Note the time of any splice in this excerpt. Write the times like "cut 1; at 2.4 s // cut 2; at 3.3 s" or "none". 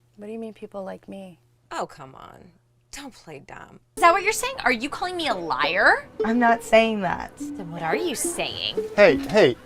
cut 1; at 3.8 s